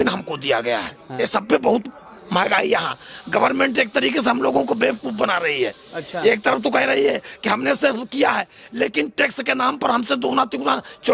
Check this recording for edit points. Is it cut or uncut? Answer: cut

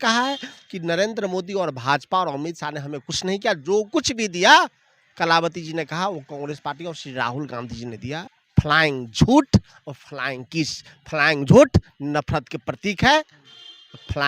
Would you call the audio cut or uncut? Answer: cut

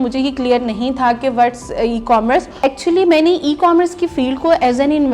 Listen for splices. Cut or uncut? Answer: cut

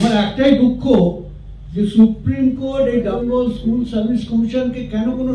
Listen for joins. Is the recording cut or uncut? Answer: cut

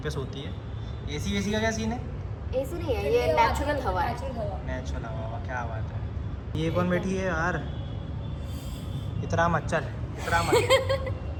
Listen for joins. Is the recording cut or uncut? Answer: uncut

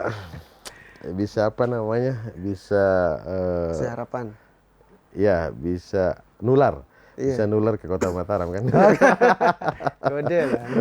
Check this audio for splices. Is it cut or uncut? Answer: cut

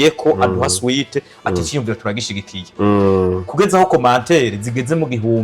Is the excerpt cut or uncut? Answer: uncut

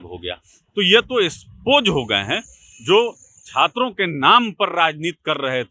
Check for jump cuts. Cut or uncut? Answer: uncut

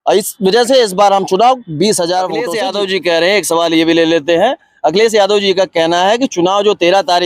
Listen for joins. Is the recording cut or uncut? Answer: cut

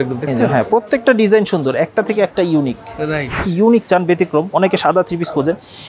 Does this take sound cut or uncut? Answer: cut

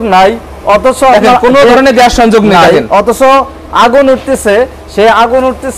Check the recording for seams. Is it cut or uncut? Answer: uncut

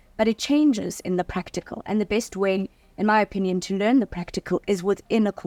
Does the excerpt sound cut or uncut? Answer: uncut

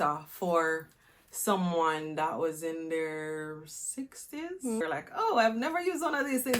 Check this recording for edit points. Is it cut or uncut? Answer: cut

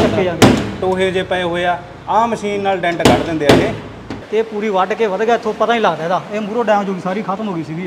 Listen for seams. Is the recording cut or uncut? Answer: cut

